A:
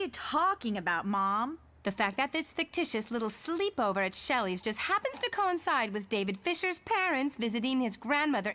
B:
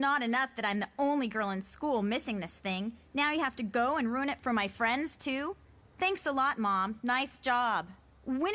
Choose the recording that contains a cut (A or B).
A